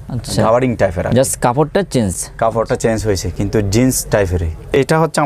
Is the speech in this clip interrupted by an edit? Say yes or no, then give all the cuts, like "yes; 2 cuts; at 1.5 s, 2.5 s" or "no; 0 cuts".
no; 0 cuts